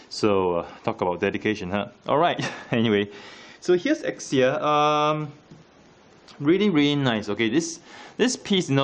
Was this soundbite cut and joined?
yes; 1 cut; at 1.4 s

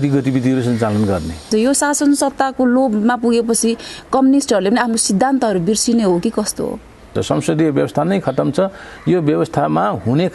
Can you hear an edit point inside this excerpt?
yes; 2 cuts; at 1.5 s, 7.1 s

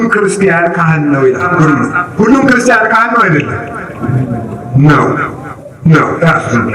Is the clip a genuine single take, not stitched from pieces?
no; 1 cut; at 1.5 s

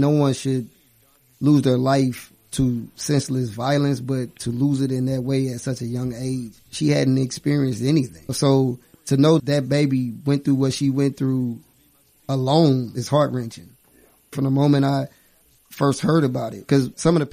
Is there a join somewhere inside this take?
yes; 2 cuts; at 8.2 s, 14.3 s

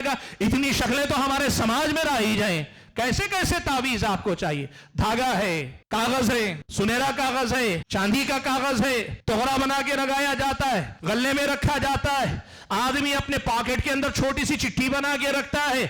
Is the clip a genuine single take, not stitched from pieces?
no; 5 cuts; at 5.7 s, 6.6 s, 7.8 s, 9.1 s, 10.9 s

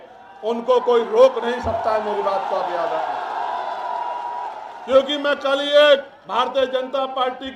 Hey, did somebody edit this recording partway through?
no; 0 cuts

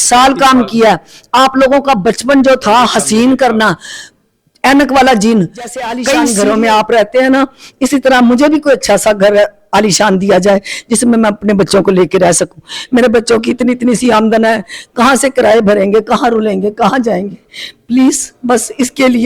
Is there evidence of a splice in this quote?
yes; 1 cut; at 6.1 s

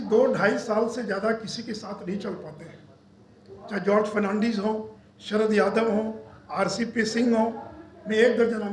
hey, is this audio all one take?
yes; 0 cuts

